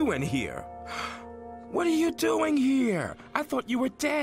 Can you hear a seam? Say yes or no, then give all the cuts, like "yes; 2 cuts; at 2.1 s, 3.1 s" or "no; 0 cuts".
no; 0 cuts